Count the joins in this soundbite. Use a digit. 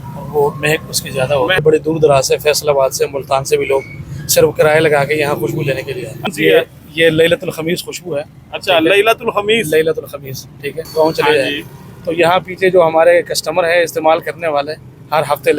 3